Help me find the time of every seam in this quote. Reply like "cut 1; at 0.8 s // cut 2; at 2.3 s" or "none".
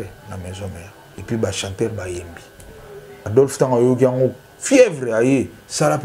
cut 1; at 1.0 s // cut 2; at 3.2 s

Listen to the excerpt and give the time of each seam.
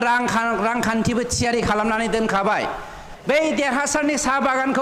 cut 1; at 3.1 s

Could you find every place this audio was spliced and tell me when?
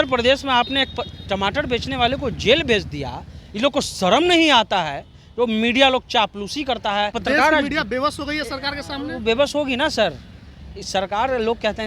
cut 1; at 7.2 s

